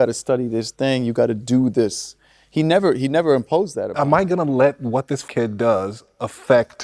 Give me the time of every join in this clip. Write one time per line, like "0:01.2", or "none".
0:03.9
0:05.2